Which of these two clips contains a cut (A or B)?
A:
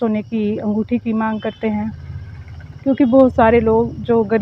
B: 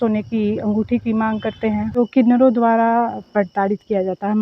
B